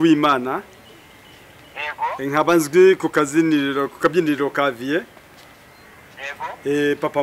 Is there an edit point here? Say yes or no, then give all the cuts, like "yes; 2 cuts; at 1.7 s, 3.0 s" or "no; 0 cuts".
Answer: no; 0 cuts